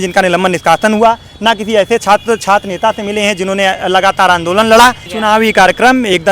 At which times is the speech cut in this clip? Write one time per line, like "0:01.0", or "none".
0:05.1